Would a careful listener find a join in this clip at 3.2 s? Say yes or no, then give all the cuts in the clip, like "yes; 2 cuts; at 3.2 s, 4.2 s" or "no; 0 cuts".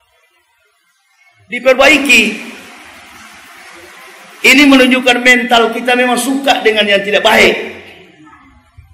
no; 0 cuts